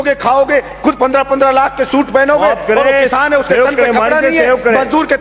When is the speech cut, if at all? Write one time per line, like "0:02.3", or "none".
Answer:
none